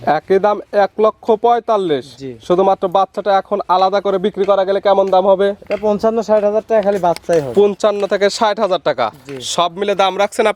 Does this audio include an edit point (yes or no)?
no